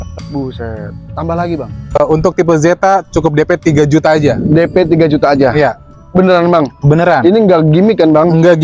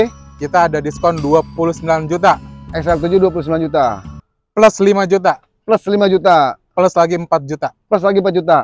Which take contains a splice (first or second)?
first